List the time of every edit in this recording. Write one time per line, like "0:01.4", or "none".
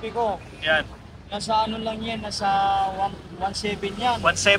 none